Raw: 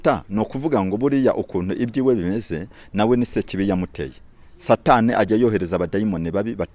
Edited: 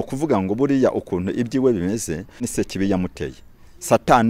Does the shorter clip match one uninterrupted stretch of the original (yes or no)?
no